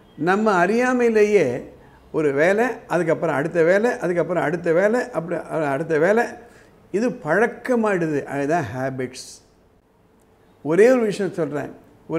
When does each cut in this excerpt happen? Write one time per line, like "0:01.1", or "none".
0:10.2